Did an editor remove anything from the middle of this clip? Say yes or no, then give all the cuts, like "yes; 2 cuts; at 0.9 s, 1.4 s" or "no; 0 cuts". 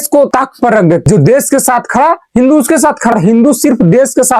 yes; 2 cuts; at 1.0 s, 3.1 s